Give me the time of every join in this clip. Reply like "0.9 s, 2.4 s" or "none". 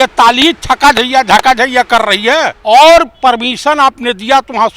2.5 s